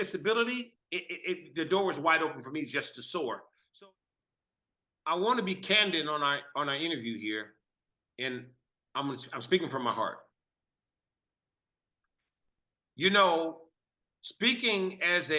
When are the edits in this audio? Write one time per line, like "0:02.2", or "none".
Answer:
0:03.6